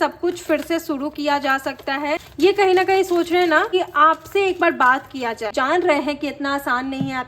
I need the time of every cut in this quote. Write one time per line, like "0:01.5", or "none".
0:02.3
0:03.7
0:05.5